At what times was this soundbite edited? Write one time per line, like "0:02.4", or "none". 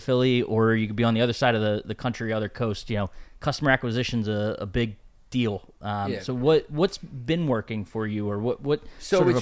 none